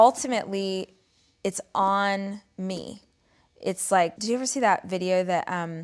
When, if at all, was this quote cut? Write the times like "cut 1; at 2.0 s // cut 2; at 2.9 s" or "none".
cut 1; at 4.2 s